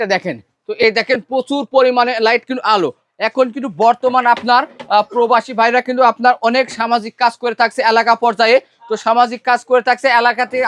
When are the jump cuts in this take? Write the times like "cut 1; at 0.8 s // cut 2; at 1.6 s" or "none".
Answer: none